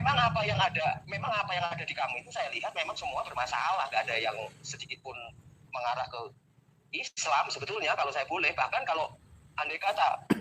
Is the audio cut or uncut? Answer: uncut